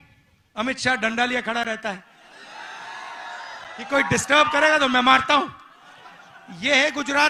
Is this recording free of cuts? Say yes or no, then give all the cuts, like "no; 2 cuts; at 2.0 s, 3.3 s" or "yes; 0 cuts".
yes; 0 cuts